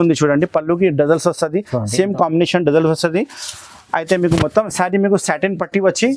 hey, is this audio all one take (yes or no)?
yes